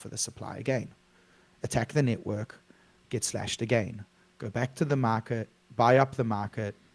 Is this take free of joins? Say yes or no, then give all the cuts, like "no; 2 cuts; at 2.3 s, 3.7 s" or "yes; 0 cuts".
yes; 0 cuts